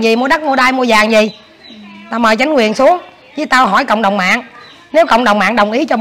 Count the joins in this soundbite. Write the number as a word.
zero